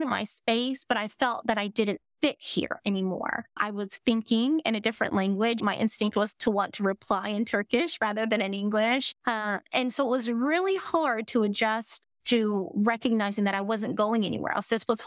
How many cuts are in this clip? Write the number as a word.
one